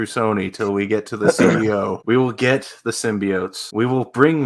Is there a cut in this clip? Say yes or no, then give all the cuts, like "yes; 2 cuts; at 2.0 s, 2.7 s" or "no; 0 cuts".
yes; 2 cuts; at 2.0 s, 3.6 s